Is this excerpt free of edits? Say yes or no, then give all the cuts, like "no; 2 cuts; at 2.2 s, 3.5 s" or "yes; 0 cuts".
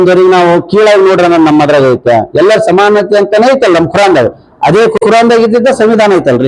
yes; 0 cuts